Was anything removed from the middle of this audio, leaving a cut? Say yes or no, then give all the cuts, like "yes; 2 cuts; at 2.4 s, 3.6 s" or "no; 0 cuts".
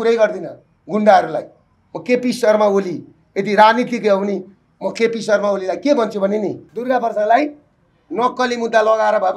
yes; 1 cut; at 6.7 s